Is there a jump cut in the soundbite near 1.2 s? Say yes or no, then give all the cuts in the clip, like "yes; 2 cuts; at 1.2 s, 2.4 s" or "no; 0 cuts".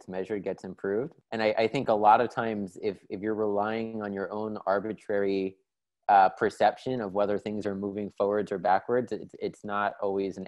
yes; 1 cut; at 1.2 s